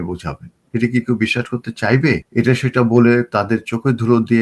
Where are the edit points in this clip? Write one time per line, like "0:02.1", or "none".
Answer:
0:02.3